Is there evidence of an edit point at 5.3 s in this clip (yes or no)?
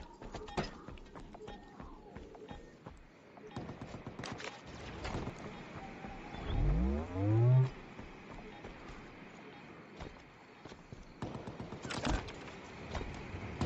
yes